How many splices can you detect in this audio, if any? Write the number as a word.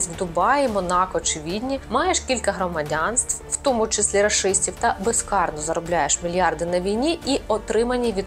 zero